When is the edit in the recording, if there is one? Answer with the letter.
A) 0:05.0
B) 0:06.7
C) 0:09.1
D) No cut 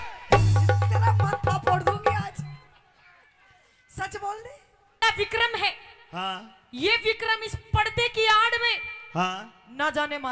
A